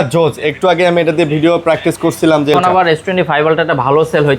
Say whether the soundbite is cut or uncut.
cut